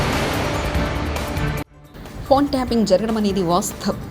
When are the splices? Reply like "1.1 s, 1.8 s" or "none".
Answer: 1.7 s